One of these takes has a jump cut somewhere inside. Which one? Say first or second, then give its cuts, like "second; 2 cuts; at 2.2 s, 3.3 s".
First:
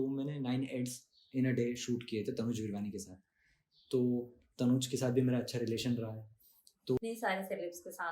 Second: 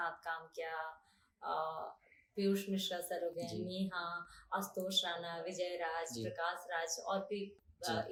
first; 1 cut; at 7.0 s